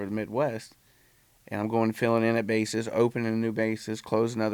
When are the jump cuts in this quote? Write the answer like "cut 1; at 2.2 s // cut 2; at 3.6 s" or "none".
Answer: none